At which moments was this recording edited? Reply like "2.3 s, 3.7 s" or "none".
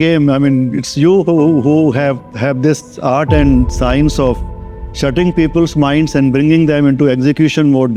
none